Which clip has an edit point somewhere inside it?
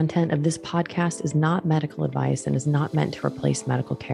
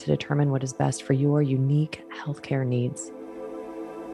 second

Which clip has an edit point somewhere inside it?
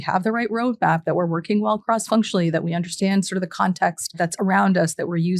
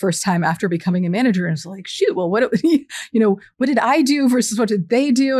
first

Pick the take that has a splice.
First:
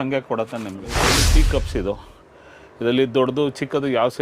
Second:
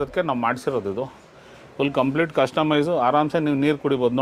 first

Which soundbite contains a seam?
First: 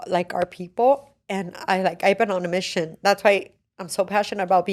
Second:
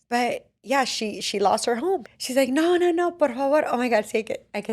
second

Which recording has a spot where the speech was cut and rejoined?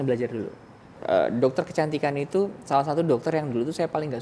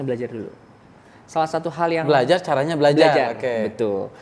first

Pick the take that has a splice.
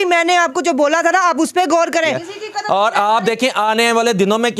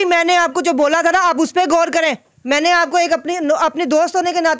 first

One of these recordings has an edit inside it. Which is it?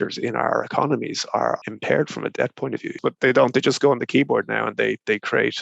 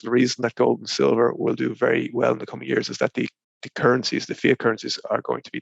first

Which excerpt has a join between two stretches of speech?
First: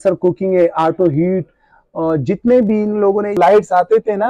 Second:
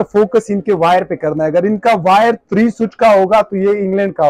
first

